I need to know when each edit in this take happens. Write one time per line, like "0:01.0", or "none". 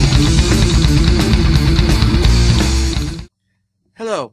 0:01.2